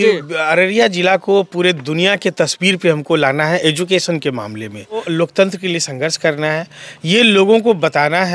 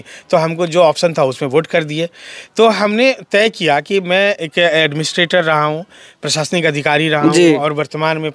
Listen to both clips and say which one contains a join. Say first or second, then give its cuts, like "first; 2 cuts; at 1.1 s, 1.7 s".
first; 1 cut; at 5.1 s